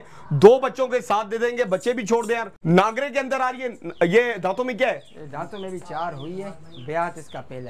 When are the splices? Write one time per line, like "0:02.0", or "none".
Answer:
0:02.5